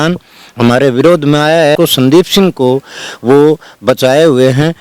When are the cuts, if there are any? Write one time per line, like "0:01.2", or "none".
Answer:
0:01.8